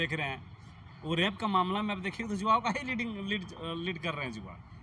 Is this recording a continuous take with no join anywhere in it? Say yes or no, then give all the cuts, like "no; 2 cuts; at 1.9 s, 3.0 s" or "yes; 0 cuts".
yes; 0 cuts